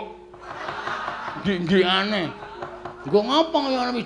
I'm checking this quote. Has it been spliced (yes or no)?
yes